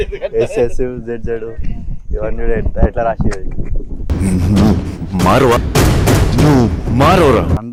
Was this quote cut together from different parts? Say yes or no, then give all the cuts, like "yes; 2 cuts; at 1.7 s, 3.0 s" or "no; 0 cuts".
no; 0 cuts